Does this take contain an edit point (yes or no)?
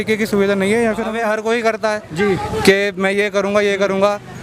yes